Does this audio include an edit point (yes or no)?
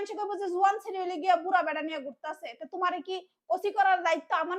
no